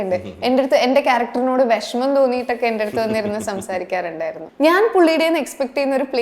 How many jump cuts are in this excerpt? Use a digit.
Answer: 1